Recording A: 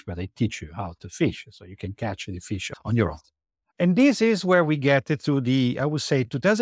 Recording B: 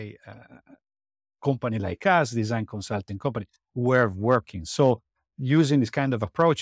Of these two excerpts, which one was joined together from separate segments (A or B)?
A